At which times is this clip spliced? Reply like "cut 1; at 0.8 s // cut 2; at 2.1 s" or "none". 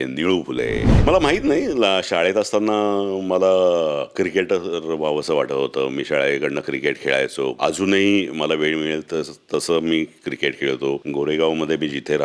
cut 1; at 0.9 s // cut 2; at 7.6 s // cut 3; at 11.0 s